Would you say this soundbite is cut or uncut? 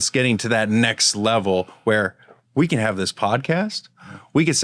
uncut